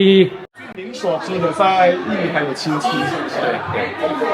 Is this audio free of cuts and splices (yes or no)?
no